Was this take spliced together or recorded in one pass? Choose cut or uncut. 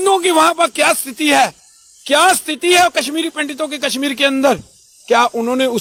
uncut